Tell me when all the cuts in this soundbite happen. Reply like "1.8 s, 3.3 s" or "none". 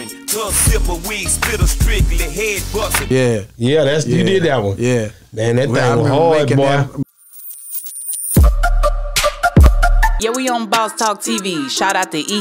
7.0 s